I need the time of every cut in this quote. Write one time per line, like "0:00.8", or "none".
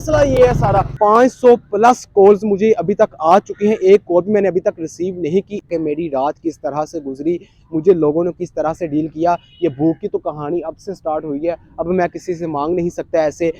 0:00.9
0:05.7